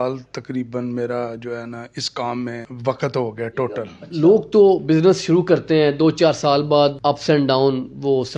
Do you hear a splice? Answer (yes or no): yes